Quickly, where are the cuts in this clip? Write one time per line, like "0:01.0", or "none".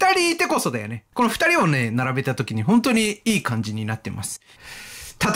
0:01.0
0:04.5

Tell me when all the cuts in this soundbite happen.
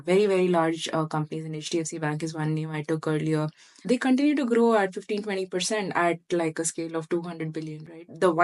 none

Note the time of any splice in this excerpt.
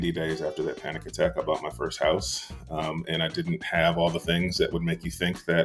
none

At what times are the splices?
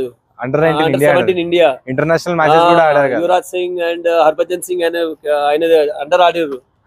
none

